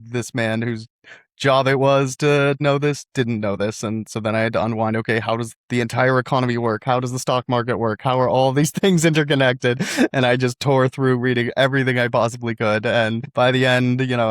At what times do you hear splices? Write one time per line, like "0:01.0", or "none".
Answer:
0:02.6